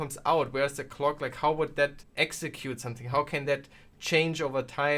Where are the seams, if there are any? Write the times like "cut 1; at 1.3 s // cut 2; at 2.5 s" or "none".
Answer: cut 1; at 2.0 s